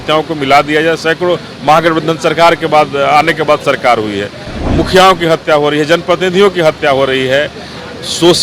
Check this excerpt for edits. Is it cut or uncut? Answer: uncut